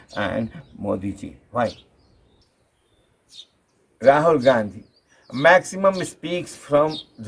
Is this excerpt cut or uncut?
cut